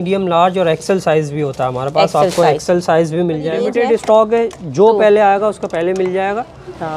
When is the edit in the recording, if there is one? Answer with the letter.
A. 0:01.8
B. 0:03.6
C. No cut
B